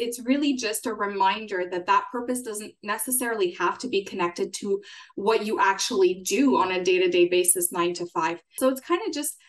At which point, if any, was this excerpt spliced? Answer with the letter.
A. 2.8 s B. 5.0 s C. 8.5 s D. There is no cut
C